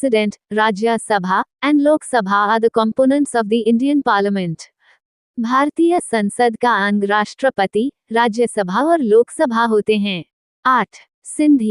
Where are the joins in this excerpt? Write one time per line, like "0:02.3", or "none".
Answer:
0:10.6